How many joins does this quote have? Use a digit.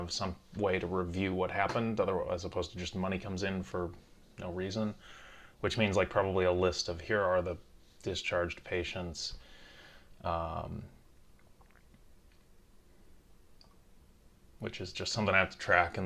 1